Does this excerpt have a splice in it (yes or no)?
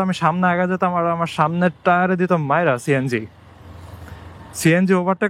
no